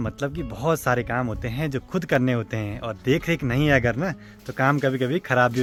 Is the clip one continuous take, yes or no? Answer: yes